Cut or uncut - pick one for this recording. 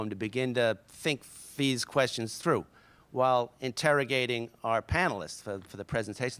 cut